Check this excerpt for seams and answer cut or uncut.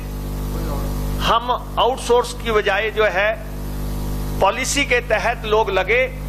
uncut